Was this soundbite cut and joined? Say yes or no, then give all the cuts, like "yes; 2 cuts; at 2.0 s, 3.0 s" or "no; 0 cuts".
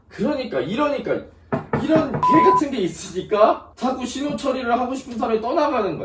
no; 0 cuts